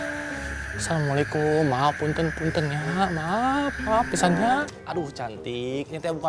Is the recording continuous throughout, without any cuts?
no; 1 cut; at 4.7 s

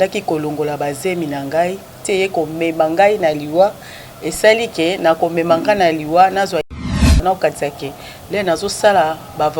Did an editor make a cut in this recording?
yes; 1 cut; at 7.2 s

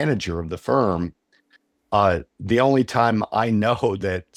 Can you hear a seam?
no; 0 cuts

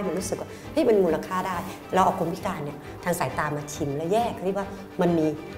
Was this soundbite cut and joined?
no; 0 cuts

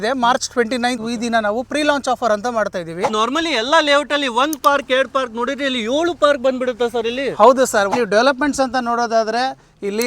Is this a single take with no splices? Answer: no; 3 cuts; at 1.0 s, 3.1 s, 7.9 s

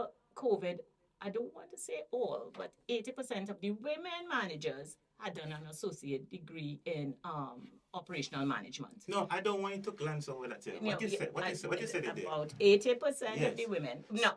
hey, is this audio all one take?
yes; 0 cuts

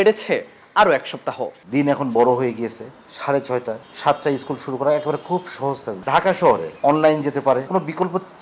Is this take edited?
yes; 5 cuts; at 1.6 s, 3.9 s, 5.9 s, 6.7 s, 7.7 s

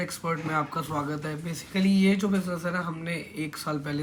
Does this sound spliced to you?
no; 0 cuts

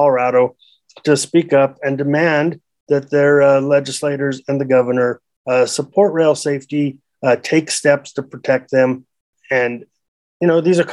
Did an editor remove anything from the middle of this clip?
yes; 1 cut; at 9.3 s

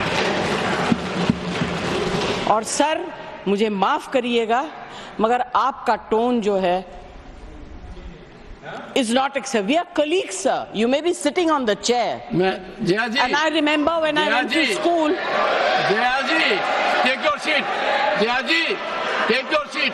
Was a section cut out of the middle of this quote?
no; 0 cuts

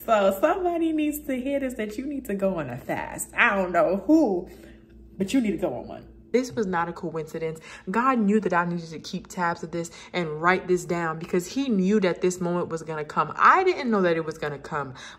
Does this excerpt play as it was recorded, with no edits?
no; 1 cut; at 6.3 s

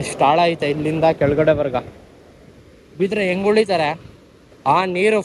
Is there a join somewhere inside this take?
no; 0 cuts

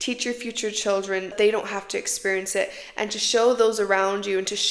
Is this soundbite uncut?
no; 1 cut; at 1.3 s

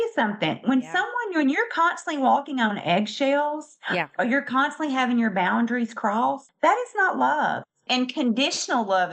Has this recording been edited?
no; 0 cuts

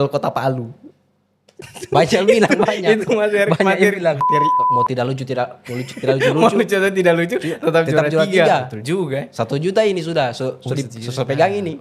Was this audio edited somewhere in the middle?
yes; 1 cut; at 4.6 s

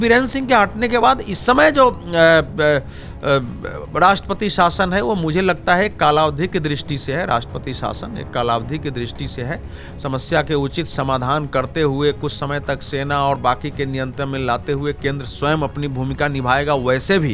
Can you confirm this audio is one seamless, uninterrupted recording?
yes; 0 cuts

